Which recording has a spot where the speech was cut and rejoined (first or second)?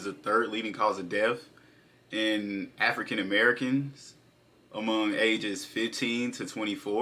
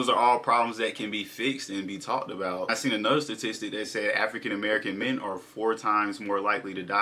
second